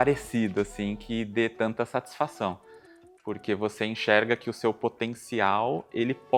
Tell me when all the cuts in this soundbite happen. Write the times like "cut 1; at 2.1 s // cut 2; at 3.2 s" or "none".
none